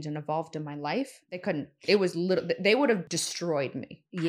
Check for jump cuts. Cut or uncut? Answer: cut